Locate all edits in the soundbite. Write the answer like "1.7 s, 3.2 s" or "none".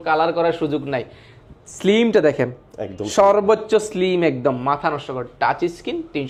none